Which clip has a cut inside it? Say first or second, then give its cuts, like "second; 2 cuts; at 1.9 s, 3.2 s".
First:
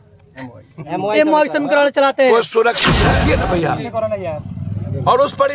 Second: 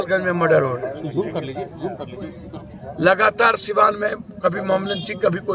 first; 1 cut; at 3.0 s